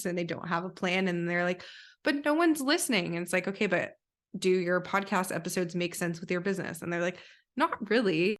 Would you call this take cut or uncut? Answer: uncut